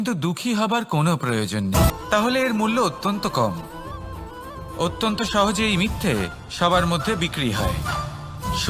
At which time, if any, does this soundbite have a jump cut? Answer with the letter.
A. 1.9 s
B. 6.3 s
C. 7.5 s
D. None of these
A